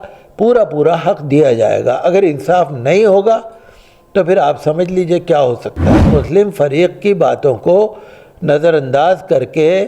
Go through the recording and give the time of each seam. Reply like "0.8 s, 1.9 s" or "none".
6.1 s